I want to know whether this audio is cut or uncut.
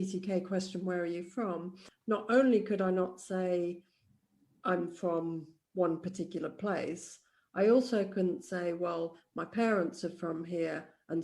cut